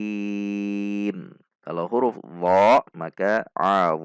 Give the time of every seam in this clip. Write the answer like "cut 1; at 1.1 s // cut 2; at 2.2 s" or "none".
none

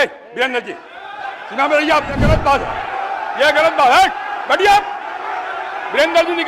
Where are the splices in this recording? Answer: cut 1; at 2.2 s

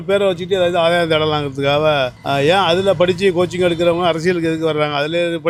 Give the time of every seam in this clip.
none

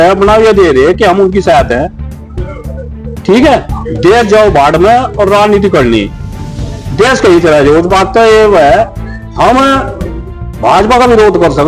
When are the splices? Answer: none

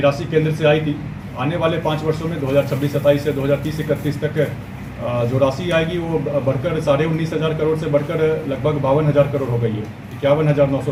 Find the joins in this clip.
none

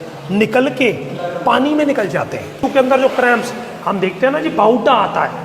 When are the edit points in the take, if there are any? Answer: cut 1; at 2.6 s

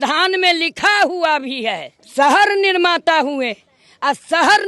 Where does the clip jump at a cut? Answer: cut 1; at 1.9 s

